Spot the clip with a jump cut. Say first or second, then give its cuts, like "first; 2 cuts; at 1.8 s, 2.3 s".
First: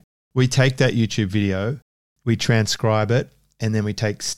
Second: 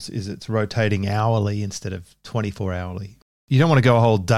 second; 1 cut; at 3.2 s